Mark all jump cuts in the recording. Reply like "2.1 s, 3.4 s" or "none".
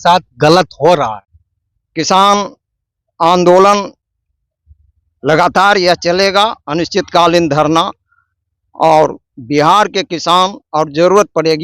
1.2 s